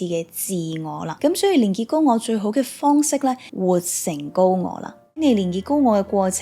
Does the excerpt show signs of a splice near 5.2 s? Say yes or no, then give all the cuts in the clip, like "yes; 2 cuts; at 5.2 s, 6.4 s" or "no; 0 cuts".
yes; 3 cuts; at 1.1 s, 3.5 s, 5.2 s